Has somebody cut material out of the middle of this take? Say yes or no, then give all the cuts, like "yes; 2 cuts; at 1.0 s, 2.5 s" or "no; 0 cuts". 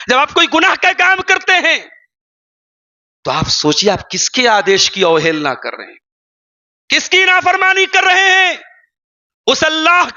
yes; 1 cut; at 4.7 s